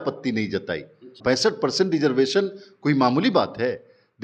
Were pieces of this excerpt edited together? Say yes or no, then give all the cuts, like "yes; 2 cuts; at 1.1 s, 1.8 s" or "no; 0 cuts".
yes; 1 cut; at 1.1 s